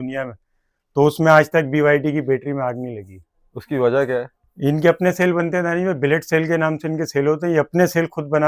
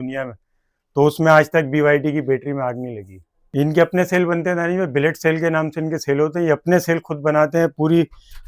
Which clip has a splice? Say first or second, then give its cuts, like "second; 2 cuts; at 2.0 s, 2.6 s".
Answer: second; 1 cut; at 3.3 s